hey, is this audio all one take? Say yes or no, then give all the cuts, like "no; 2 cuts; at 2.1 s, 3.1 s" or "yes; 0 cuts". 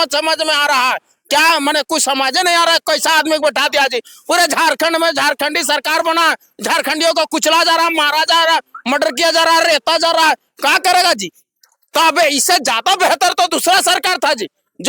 yes; 0 cuts